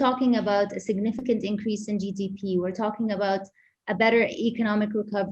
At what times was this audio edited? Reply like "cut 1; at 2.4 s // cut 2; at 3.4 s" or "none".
none